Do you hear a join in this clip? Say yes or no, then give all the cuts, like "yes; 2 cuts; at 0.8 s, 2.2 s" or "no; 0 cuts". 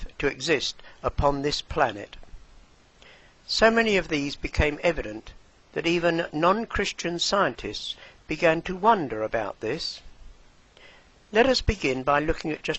yes; 1 cut; at 6.9 s